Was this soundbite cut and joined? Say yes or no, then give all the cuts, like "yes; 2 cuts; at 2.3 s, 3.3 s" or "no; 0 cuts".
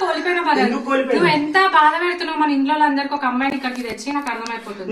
no; 0 cuts